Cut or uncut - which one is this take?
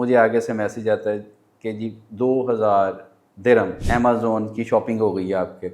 cut